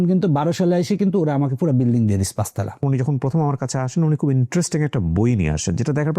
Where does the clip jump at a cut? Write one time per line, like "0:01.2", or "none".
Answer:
0:02.8